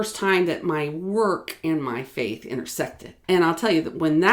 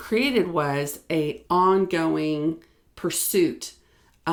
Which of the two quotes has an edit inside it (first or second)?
first